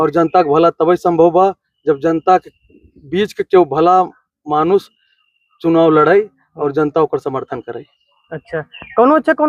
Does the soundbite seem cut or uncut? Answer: uncut